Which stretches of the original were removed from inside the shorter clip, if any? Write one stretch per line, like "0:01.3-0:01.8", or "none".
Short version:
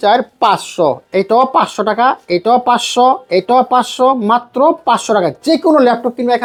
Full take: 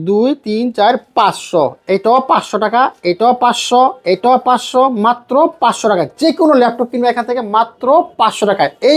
none